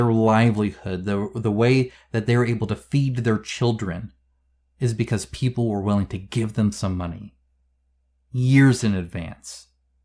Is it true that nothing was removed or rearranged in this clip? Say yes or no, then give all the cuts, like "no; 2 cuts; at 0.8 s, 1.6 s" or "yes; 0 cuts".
yes; 0 cuts